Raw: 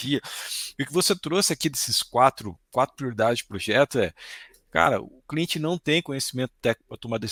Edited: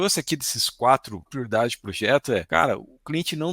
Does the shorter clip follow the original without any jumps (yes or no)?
no